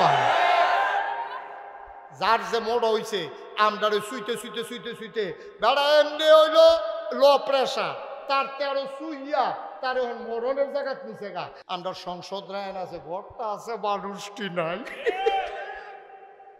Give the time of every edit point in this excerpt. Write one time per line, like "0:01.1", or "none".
0:11.6